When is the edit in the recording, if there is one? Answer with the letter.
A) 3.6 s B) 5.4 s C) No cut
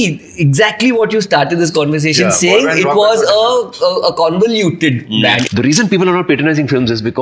B